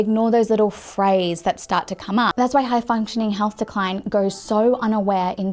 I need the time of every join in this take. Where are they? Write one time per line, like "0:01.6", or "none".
0:02.3